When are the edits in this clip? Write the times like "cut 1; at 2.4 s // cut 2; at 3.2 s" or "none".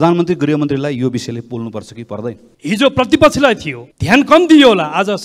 cut 1; at 2.5 s